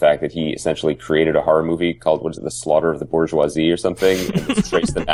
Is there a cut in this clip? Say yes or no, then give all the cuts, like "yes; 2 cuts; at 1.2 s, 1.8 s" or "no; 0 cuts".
no; 0 cuts